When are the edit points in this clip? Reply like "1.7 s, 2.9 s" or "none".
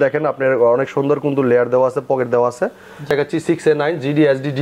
3.1 s